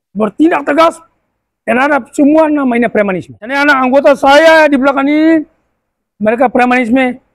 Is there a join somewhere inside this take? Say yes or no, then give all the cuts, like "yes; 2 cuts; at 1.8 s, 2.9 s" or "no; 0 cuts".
yes; 1 cut; at 3.4 s